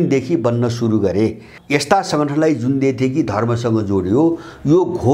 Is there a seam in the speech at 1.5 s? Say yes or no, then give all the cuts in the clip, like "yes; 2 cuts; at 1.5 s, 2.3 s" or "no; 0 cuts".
yes; 1 cut; at 1.5 s